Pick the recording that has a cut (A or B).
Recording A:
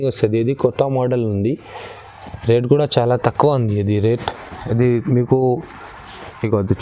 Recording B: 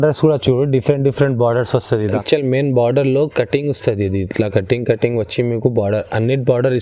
B